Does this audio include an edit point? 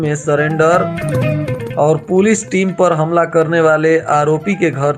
no; 0 cuts

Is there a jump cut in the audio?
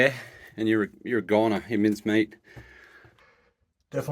yes; 1 cut; at 3.2 s

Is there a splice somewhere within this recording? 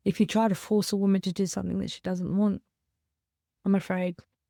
no; 0 cuts

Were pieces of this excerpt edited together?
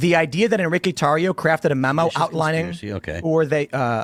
no; 0 cuts

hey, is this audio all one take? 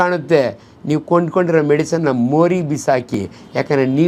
yes; 0 cuts

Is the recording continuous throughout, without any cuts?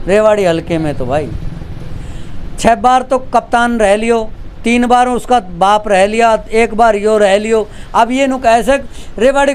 yes; 0 cuts

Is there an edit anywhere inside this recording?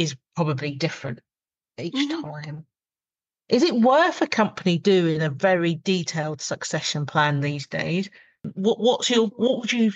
yes; 1 cut; at 8.4 s

